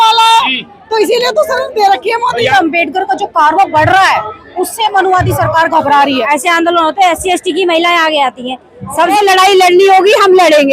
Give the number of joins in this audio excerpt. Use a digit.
3